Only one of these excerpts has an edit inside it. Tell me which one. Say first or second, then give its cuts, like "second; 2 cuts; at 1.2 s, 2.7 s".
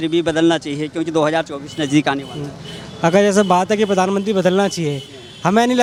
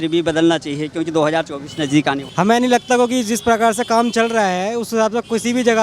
second; 1 cut; at 2.2 s